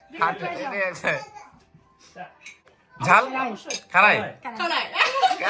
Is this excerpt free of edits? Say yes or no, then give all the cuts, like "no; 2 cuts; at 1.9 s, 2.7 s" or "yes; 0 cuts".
no; 1 cut; at 2.8 s